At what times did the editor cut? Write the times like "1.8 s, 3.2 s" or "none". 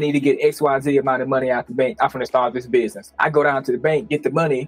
3.1 s